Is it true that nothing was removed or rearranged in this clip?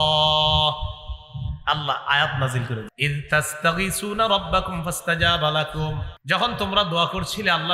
no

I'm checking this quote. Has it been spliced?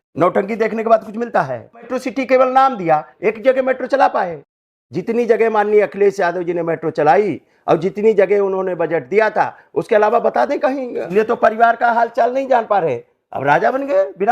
yes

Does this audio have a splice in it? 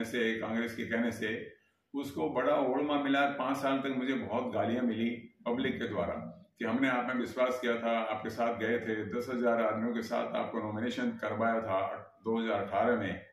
no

